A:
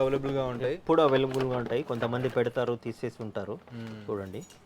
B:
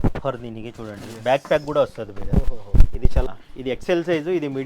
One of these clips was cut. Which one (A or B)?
B